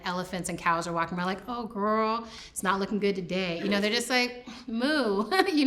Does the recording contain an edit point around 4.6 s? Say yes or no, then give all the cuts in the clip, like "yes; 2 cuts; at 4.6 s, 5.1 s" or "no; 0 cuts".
no; 0 cuts